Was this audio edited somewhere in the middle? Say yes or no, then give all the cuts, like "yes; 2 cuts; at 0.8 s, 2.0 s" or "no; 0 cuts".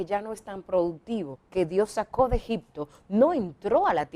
yes; 1 cut; at 1.4 s